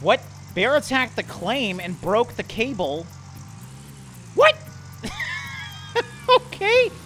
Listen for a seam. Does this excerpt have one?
no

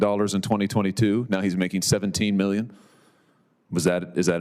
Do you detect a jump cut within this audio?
no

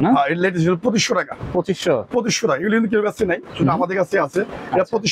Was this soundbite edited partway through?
no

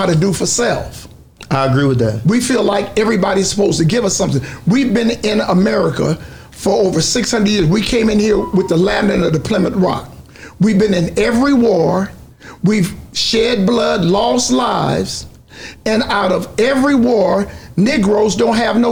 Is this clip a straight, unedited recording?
yes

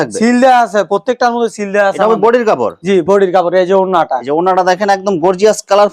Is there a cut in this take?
no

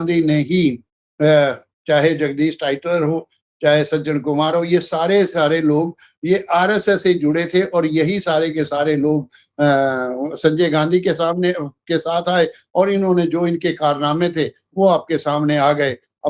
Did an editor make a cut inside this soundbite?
no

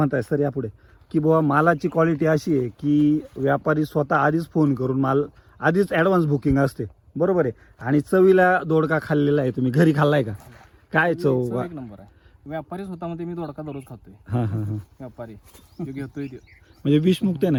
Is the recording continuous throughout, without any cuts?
yes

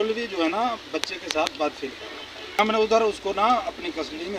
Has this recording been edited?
yes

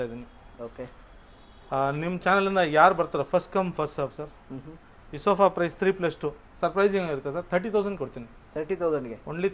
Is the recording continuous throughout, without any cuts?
yes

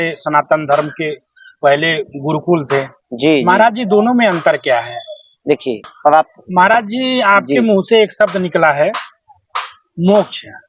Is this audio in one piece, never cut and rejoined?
no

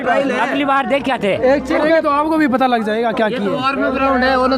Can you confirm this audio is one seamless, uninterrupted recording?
yes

